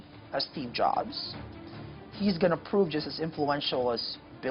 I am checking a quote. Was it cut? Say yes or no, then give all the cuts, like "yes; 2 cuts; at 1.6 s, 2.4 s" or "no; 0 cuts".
no; 0 cuts